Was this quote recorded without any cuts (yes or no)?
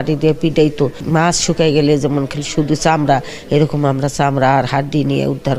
no